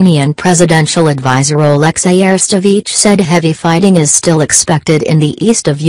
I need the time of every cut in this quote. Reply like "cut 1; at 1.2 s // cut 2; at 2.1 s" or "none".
cut 1; at 1.1 s